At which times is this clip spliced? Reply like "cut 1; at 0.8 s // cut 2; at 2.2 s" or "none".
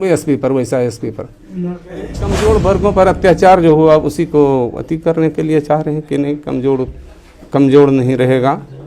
cut 1; at 2.3 s